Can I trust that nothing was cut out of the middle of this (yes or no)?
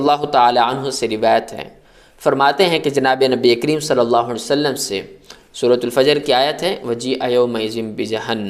yes